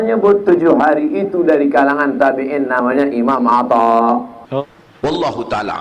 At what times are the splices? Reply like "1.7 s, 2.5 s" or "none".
4.4 s